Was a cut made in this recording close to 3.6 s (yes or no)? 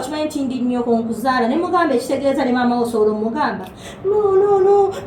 no